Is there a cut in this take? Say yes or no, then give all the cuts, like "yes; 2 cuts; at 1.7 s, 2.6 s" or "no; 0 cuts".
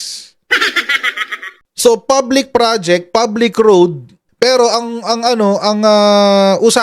no; 0 cuts